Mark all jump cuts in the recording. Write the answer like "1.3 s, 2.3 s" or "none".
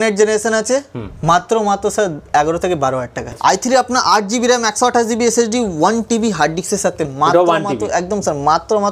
3.3 s